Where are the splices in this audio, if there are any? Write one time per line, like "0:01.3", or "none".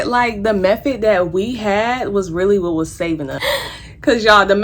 0:03.3